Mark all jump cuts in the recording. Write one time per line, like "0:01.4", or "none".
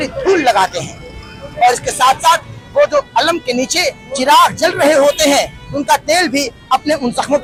none